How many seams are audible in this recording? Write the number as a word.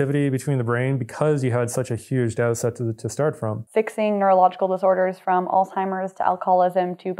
one